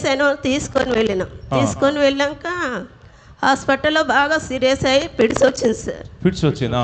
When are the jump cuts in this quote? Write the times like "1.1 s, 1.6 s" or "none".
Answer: none